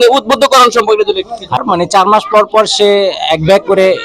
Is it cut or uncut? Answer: cut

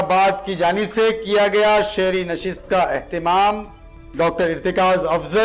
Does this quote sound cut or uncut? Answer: uncut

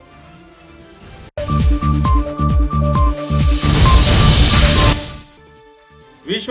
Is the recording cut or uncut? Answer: cut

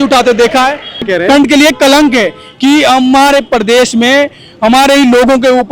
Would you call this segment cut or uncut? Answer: cut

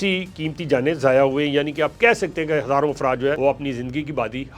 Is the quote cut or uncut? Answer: cut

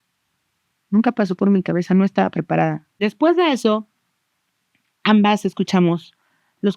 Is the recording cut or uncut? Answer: cut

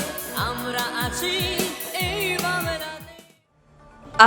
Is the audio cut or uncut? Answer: uncut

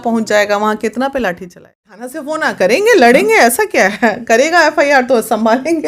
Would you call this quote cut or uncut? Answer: cut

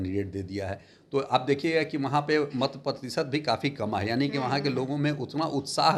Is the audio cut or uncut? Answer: uncut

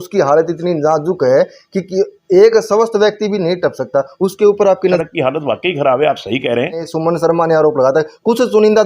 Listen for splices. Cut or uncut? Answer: cut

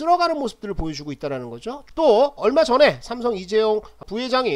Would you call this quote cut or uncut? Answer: cut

